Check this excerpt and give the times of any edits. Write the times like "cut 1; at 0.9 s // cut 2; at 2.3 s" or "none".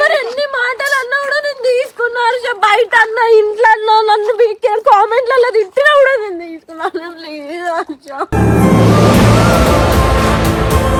none